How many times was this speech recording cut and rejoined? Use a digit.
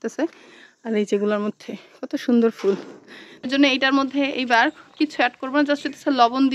1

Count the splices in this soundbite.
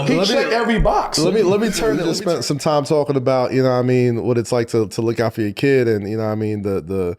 1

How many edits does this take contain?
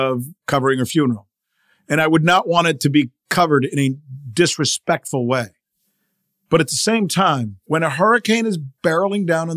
1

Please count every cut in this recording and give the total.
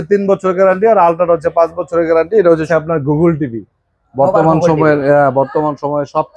1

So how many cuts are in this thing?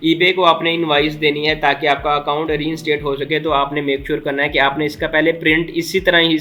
0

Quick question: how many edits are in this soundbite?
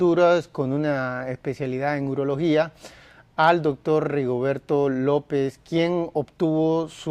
1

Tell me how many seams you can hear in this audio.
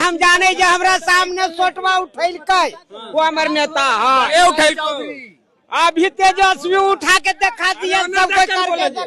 0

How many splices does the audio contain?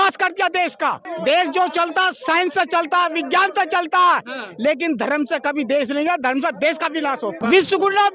2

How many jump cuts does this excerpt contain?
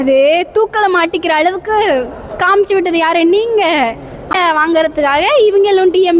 1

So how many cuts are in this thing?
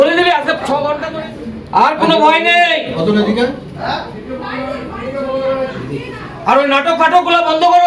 1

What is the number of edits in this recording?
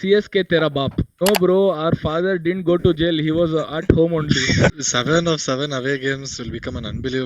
2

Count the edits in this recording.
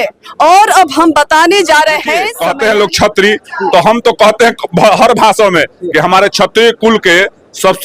1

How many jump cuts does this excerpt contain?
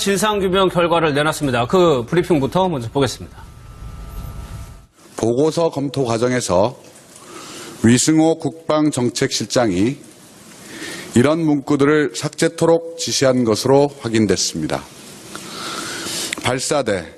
1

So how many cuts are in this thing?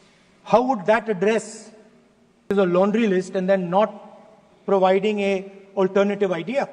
1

